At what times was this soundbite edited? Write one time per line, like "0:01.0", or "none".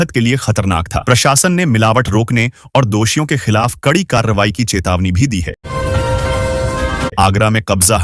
none